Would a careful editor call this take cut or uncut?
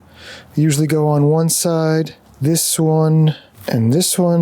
cut